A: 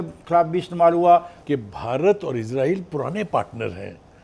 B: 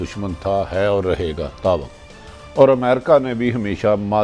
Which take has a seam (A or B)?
A